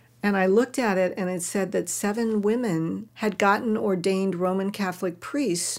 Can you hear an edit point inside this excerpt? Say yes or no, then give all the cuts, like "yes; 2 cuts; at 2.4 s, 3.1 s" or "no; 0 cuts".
yes; 1 cut; at 3.1 s